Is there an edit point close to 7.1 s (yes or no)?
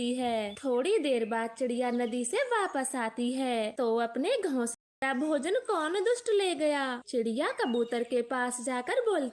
no